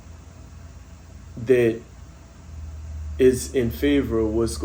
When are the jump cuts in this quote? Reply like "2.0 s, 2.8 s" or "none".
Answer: none